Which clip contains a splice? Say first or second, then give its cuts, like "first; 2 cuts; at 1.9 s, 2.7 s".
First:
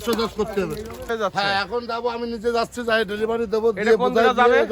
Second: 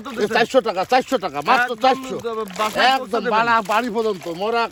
first; 1 cut; at 1.1 s